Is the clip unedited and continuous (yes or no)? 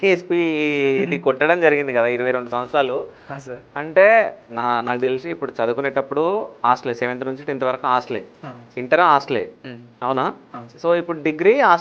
yes